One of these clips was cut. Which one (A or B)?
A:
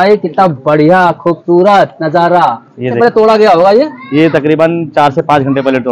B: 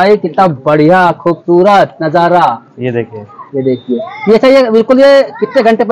A